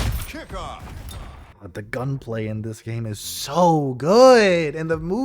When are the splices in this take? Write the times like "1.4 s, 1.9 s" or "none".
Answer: 1.4 s